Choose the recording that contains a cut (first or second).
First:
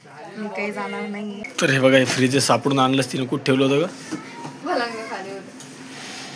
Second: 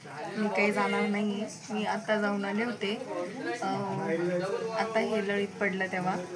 first